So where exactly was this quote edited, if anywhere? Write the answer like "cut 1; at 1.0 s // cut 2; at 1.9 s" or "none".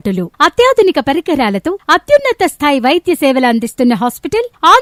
none